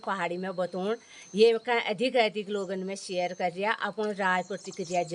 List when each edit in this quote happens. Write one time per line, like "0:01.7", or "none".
none